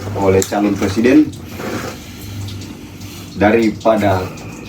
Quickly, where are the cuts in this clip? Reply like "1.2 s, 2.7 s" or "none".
none